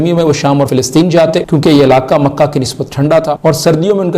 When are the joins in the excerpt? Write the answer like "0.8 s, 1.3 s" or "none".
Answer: 1.0 s, 3.4 s